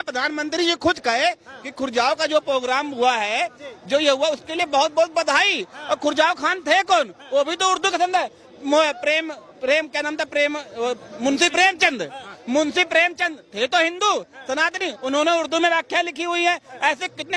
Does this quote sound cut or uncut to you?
uncut